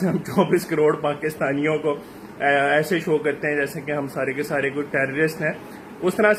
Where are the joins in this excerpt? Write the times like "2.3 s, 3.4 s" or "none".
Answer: none